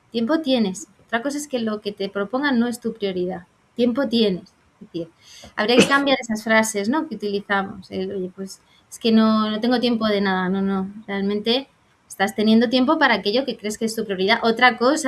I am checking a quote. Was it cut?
no; 0 cuts

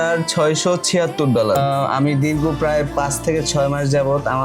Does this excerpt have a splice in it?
yes; 1 cut; at 1.6 s

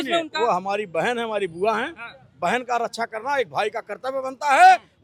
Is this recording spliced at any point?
no; 0 cuts

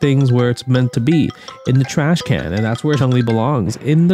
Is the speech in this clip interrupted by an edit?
yes; 1 cut; at 3.0 s

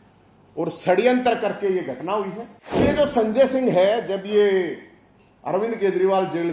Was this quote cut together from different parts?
yes; 1 cut; at 2.8 s

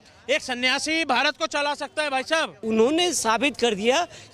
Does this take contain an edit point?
yes; 1 cut; at 2.6 s

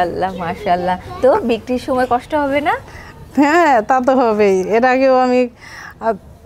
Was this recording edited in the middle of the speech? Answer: no; 0 cuts

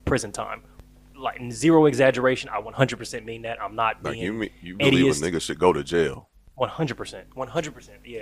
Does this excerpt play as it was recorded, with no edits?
yes; 0 cuts

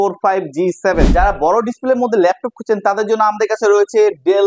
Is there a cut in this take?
yes; 1 cut; at 1.0 s

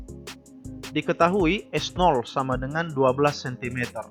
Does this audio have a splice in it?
yes; 1 cut; at 0.9 s

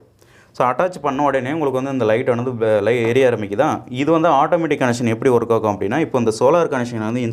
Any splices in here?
no; 0 cuts

